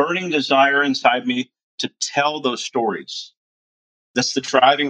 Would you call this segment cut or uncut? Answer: cut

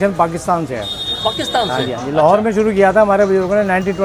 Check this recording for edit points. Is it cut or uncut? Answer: uncut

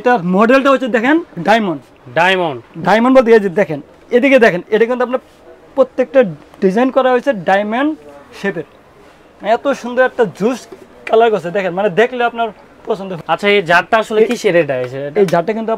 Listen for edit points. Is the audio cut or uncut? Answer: cut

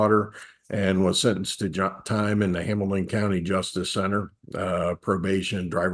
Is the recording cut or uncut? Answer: uncut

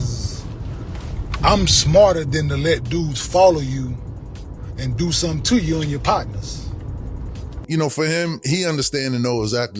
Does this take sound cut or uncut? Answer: cut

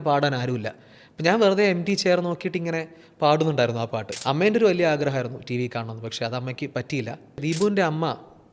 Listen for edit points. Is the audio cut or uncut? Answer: cut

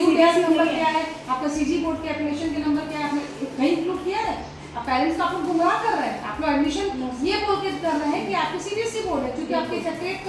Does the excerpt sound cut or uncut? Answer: uncut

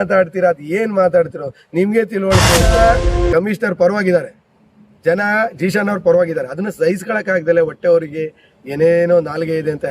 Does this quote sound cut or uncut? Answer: cut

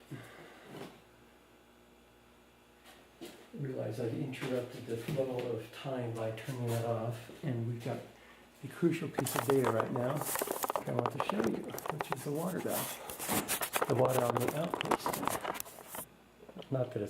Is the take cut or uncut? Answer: cut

